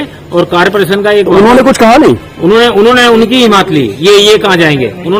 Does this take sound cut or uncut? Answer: uncut